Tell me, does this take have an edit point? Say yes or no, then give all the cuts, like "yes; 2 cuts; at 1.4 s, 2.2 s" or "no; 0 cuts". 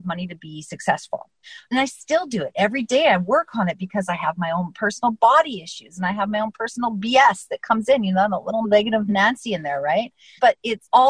yes; 1 cut; at 8.7 s